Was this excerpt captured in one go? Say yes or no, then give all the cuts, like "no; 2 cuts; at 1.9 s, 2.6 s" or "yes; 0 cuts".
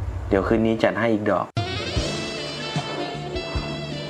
yes; 0 cuts